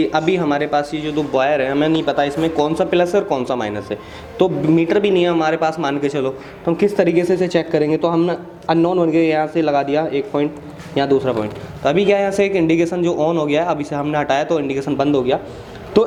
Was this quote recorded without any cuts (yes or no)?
yes